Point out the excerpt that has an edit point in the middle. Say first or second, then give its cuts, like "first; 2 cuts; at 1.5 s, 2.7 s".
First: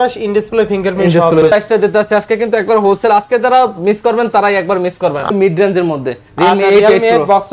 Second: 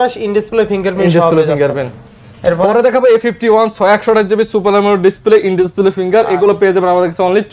first; 2 cuts; at 1.5 s, 5.3 s